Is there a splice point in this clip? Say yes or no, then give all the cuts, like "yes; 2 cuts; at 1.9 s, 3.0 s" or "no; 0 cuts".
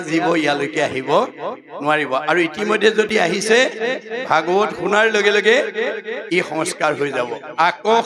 no; 0 cuts